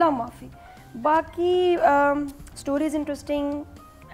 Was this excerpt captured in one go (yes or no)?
yes